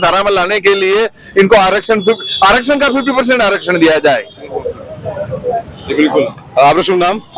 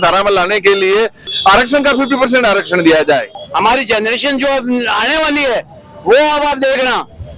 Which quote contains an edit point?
second; 2 cuts; at 1.3 s, 3.4 s

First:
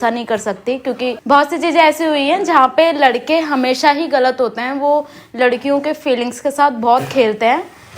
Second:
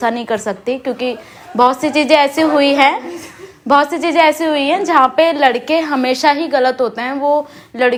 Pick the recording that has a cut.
first; 1 cut; at 1.1 s

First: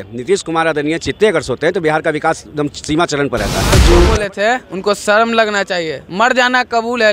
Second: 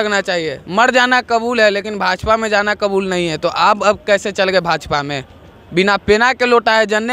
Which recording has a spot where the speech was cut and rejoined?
first; 1 cut; at 3.8 s

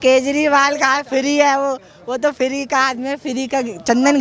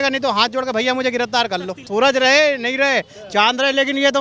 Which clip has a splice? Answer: second; 1 cut; at 1.8 s

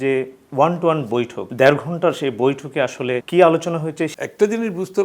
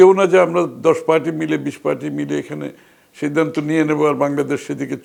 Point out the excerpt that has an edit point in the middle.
first; 3 cuts; at 1.4 s, 3.2 s, 4.1 s

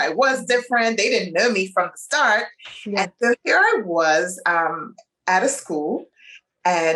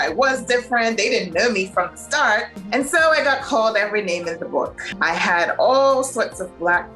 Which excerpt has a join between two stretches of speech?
second; 2 cuts; at 2.6 s, 4.8 s

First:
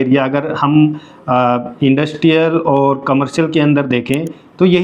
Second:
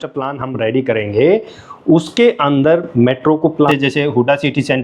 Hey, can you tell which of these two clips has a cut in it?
second; 1 cut; at 3.7 s

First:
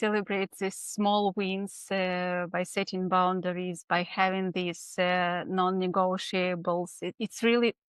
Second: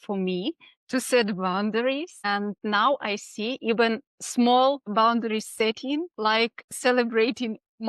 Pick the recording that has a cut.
second; 4 cuts; at 2.5 s, 4.1 s, 4.9 s, 6.1 s

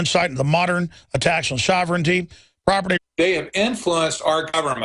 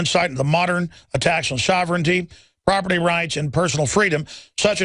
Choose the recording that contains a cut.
second; 1 cut; at 3.0 s

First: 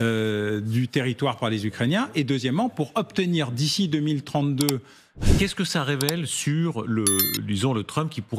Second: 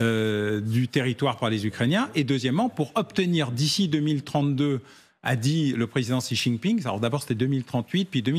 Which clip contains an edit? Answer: first; 1 cut; at 5.2 s

